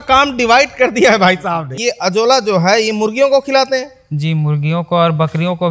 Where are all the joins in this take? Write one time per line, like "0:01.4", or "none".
0:01.8